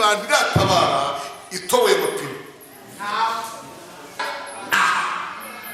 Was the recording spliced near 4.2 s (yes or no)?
yes